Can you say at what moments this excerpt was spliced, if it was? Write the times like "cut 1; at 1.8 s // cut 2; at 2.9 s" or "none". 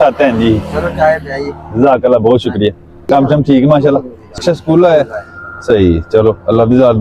cut 1; at 2.9 s // cut 2; at 4.4 s

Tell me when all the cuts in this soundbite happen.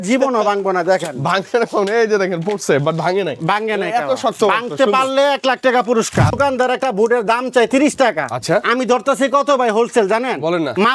cut 1; at 6.3 s

